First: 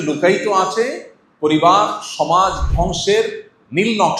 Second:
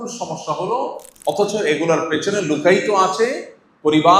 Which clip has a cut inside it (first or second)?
second